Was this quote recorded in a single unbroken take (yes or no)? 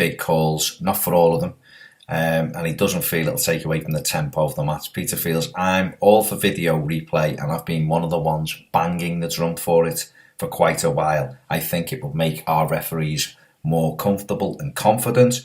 no